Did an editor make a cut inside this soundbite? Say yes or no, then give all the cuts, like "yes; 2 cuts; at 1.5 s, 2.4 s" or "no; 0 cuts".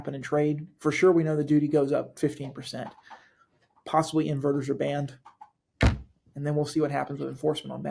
no; 0 cuts